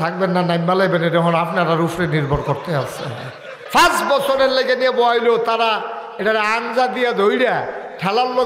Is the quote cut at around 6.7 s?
no; 1 cut; at 3.6 s

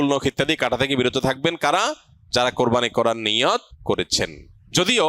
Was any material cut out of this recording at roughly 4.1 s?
yes; 1 cut; at 4.1 s

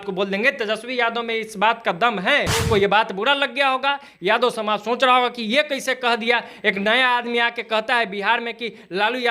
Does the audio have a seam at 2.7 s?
yes; 1 cut; at 2.7 s

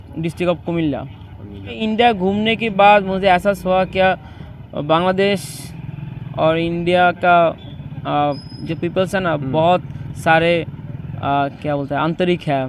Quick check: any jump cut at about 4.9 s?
no; 1 cut; at 1.8 s

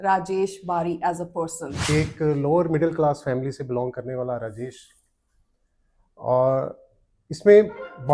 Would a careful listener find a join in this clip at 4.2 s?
no; 1 cut; at 1.7 s

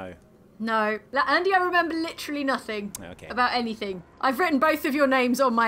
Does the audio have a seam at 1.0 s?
yes; 2 cuts; at 1.0 s, 4.2 s

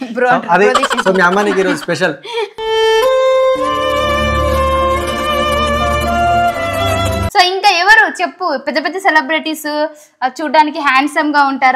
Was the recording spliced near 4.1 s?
no; 2 cuts; at 2.5 s, 7.3 s

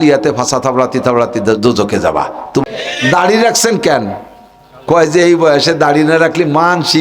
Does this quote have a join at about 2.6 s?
yes; 1 cut; at 2.6 s

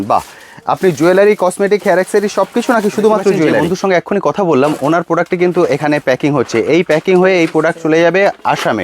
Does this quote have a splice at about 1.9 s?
no; 1 cut; at 3.6 s

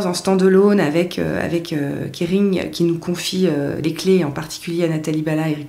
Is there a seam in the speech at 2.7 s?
no; 0 cuts

